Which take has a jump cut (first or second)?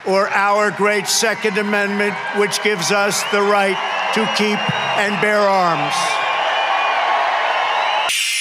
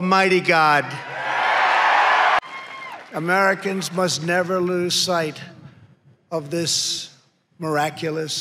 second